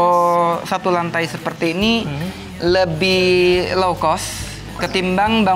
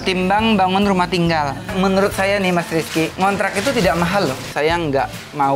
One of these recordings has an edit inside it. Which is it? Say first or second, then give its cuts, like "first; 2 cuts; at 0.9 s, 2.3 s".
second; 3 cuts; at 1.7 s, 3.1 s, 4.5 s